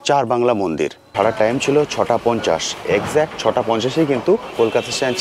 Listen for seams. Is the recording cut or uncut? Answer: cut